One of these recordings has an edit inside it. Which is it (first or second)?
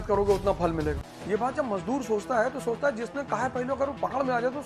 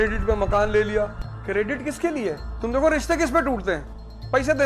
second